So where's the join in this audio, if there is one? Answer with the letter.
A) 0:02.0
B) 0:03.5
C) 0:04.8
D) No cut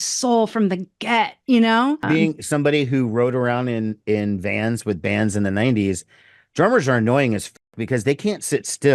A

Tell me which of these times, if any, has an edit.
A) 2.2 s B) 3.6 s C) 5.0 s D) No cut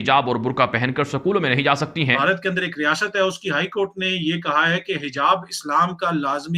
A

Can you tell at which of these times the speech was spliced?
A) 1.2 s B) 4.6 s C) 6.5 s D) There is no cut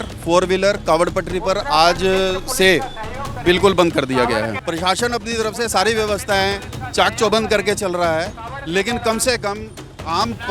B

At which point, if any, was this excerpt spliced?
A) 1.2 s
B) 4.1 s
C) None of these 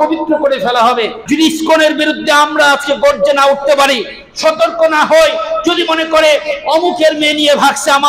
A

